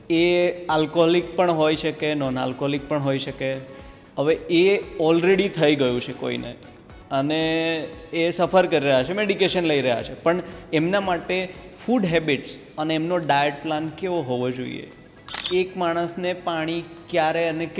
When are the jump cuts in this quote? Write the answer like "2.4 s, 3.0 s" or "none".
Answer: 15.4 s